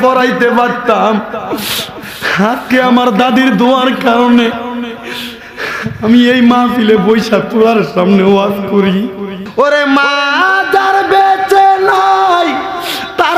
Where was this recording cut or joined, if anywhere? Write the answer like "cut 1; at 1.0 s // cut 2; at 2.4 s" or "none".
cut 1; at 9.4 s